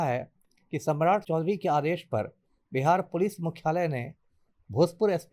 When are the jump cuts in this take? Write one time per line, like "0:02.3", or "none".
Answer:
0:01.2